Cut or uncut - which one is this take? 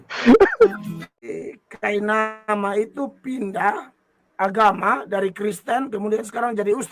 cut